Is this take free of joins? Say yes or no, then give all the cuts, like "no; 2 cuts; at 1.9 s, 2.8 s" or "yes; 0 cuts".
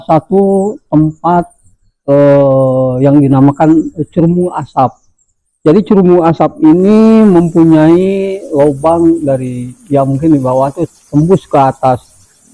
yes; 0 cuts